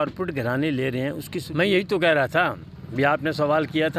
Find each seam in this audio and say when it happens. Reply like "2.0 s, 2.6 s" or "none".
1.4 s